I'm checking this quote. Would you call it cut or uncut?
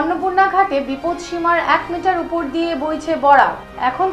uncut